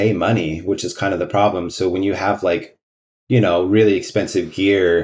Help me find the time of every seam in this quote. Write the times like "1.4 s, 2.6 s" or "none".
none